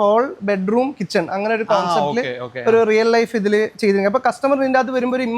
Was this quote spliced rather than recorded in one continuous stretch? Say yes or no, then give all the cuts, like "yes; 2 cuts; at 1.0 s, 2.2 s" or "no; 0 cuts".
no; 0 cuts